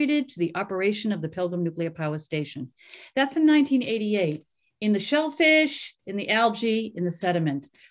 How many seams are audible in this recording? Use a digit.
0